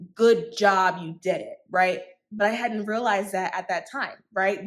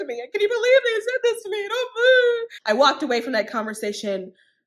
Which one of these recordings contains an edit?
second; 1 cut; at 2.5 s

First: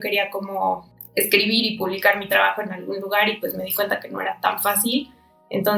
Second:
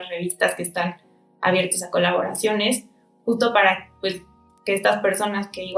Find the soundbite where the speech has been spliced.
first; 1 cut; at 0.9 s

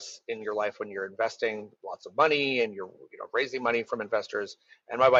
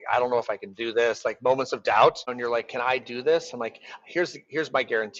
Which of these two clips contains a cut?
second; 1 cut; at 2.4 s

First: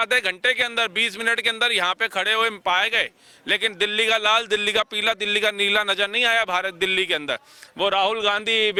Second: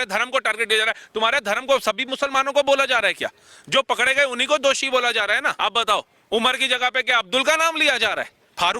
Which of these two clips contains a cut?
second; 1 cut; at 5.5 s

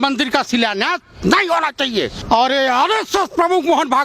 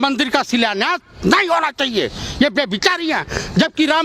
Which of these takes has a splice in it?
first; 1 cut; at 2.2 s

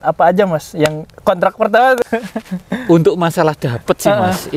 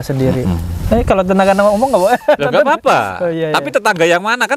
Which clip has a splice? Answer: first; 1 cut; at 2.0 s

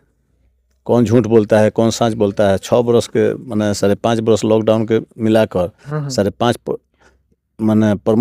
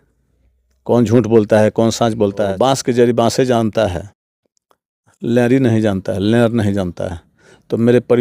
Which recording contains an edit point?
second; 1 cut; at 2.5 s

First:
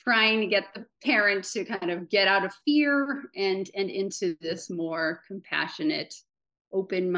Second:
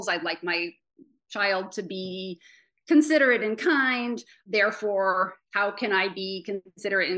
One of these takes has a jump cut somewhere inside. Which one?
second; 1 cut; at 4.4 s

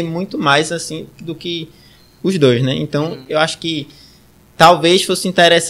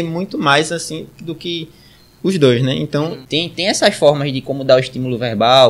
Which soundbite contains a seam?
second; 1 cut; at 3.2 s

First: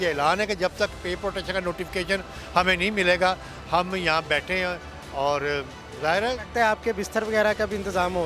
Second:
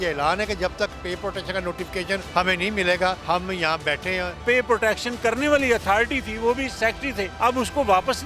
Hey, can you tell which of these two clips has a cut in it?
second; 4 cuts; at 2.3 s, 3.2 s, 4.4 s, 7.0 s

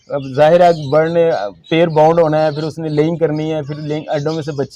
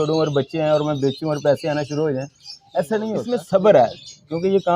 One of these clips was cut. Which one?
second; 1 cut; at 3.2 s

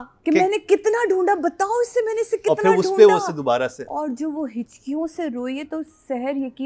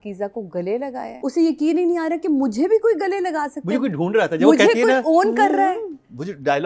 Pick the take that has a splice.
second; 1 cut; at 1.2 s

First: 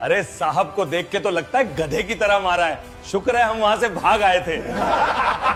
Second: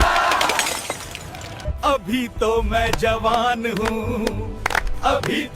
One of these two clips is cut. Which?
second; 1 cut; at 1.7 s

